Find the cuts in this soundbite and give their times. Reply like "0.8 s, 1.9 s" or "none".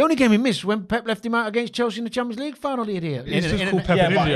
3.3 s